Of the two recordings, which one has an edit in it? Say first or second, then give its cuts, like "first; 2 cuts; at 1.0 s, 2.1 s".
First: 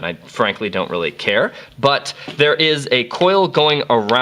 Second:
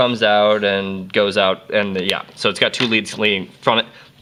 first; 1 cut; at 2.0 s